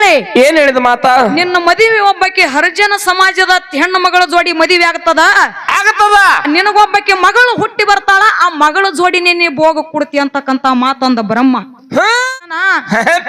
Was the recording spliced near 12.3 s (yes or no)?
yes